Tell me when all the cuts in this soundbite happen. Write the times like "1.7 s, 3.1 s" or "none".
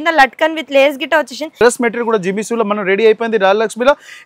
1.5 s